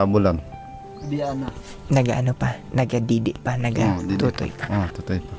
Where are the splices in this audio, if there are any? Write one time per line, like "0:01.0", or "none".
none